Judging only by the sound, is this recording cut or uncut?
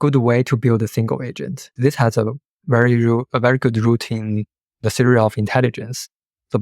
cut